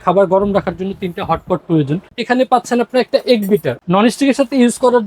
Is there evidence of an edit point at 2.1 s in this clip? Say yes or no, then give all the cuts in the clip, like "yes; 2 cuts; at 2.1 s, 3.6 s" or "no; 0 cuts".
yes; 2 cuts; at 2.1 s, 3.8 s